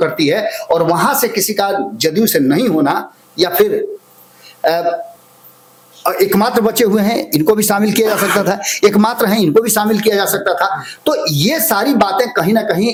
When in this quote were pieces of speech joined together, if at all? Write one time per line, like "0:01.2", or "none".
none